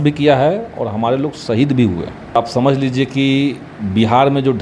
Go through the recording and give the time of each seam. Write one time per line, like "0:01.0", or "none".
0:02.4